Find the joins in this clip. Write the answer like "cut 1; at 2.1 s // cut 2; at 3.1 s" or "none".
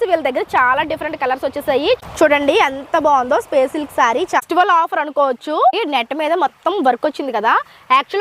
cut 1; at 2.1 s // cut 2; at 4.4 s // cut 3; at 5.8 s